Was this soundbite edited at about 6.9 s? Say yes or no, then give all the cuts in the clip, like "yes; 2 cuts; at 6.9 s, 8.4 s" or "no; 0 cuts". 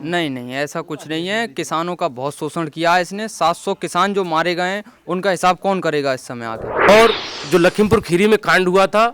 yes; 1 cut; at 6.9 s